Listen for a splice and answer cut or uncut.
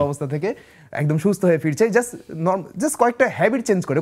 uncut